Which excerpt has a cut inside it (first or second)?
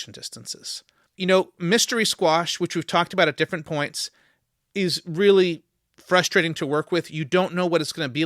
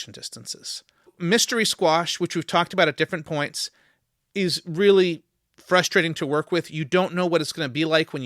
second